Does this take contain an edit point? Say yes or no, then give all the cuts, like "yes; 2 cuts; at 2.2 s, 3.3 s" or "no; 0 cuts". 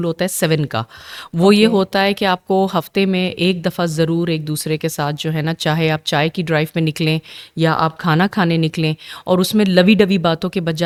no; 0 cuts